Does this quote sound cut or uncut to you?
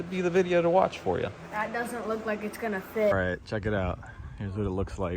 cut